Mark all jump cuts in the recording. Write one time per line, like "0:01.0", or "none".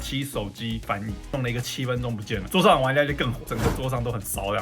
0:01.3